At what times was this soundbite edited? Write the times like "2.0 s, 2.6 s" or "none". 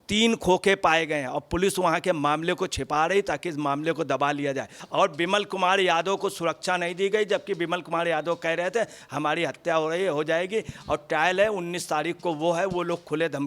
4.8 s